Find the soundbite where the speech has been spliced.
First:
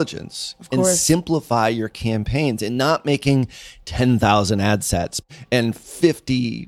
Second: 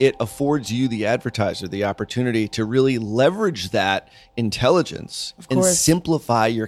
first; 1 cut; at 5.2 s

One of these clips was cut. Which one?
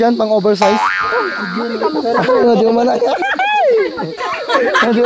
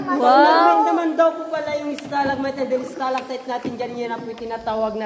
first; 1 cut; at 1.1 s

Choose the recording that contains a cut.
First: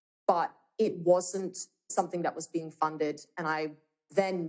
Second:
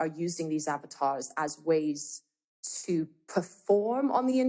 first; 1 cut; at 1.9 s

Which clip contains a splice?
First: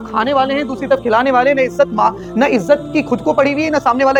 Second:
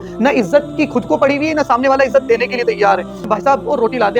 second; 1 cut; at 3.2 s

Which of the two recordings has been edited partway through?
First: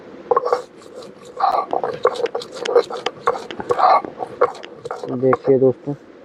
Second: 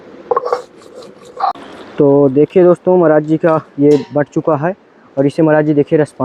second; 1 cut; at 1.5 s

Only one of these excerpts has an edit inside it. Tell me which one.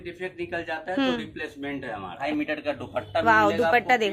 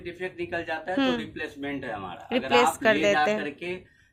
first; 1 cut; at 2.3 s

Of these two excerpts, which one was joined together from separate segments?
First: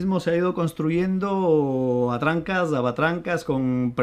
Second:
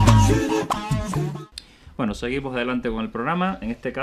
first; 1 cut; at 1.7 s

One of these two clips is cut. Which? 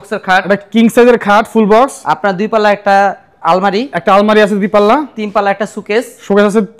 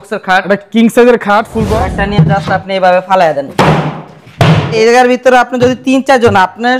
second; 2 cuts; at 1.6 s, 4.8 s

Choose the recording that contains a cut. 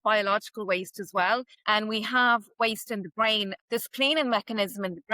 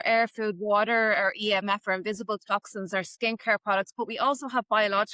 first; 2 cuts; at 1.5 s, 3.5 s

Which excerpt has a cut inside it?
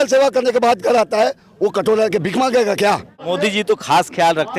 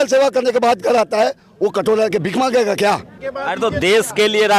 first; 1 cut; at 3.1 s

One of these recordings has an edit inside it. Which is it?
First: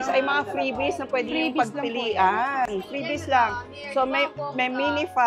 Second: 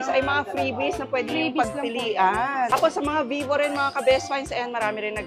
second; 1 cut; at 2.7 s

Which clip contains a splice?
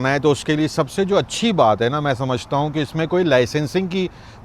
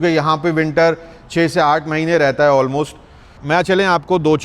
second; 1 cut; at 3.2 s

